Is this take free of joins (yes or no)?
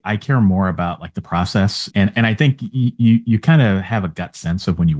no